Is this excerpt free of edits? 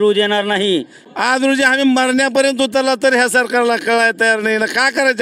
no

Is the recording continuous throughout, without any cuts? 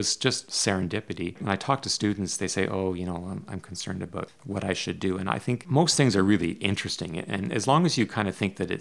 yes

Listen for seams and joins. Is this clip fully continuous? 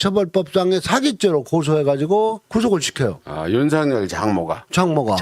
yes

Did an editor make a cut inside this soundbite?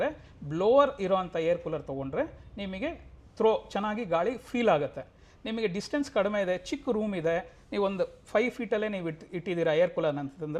no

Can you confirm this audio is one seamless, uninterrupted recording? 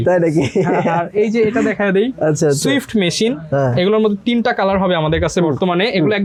yes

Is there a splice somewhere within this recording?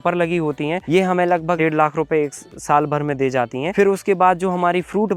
yes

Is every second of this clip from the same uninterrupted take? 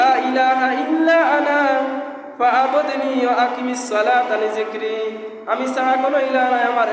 yes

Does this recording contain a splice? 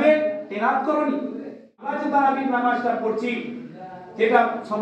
yes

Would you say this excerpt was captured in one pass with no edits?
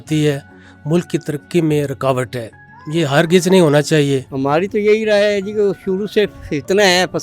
no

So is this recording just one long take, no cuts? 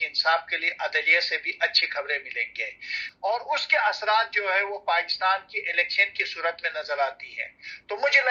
no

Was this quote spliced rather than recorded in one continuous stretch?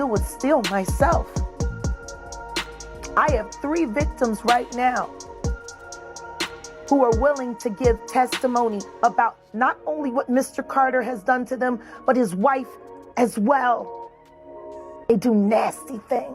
yes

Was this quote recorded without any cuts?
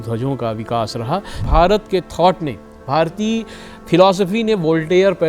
no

